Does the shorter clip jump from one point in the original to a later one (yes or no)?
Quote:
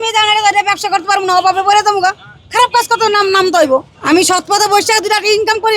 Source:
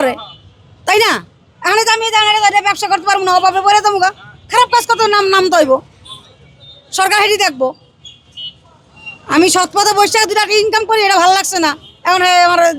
yes